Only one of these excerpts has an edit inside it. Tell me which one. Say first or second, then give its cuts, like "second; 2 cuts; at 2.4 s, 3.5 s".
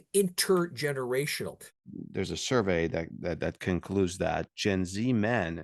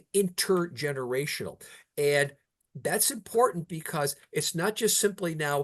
first; 1 cut; at 1.8 s